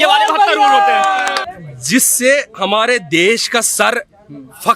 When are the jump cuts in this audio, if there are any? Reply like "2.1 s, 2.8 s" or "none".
1.5 s